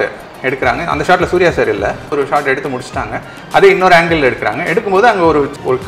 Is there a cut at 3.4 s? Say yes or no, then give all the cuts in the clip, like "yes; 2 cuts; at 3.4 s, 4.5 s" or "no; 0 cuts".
no; 1 cut; at 2.1 s